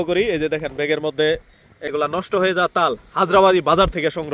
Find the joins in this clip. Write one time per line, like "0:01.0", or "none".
0:01.9

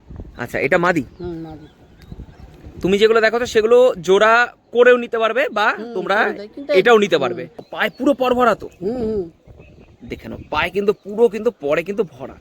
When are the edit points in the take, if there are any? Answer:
0:07.7

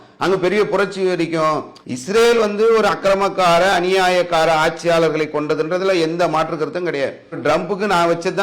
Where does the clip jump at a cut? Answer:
0:01.8
0:07.3

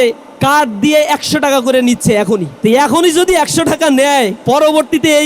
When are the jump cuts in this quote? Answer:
0:02.5
0:04.4

